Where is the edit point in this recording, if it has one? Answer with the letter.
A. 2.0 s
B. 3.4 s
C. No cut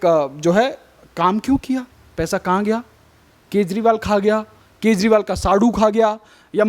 A